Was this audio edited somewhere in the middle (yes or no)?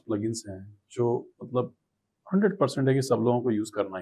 no